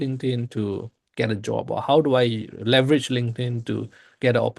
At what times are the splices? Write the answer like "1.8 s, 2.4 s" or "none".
none